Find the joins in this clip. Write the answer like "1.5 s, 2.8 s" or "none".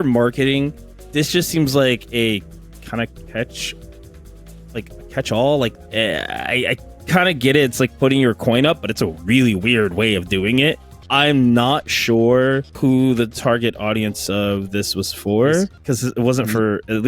5.7 s, 10.9 s, 12.7 s, 15.8 s